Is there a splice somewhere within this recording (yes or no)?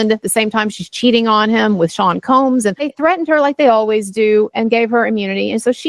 yes